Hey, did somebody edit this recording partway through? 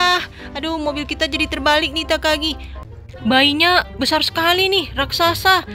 yes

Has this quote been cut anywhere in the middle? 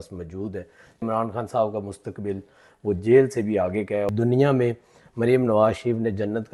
yes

